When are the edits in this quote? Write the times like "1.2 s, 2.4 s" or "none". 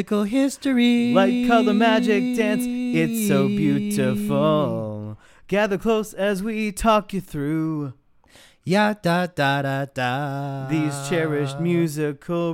none